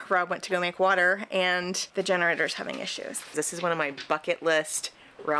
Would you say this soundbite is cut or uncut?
cut